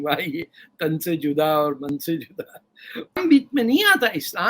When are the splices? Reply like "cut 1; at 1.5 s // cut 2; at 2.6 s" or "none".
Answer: cut 1; at 3.2 s